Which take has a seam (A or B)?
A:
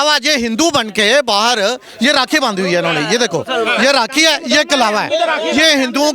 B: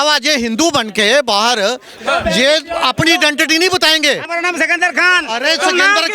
B